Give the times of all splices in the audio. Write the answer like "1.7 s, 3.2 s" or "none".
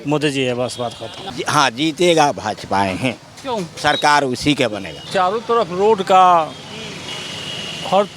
1.3 s, 5.1 s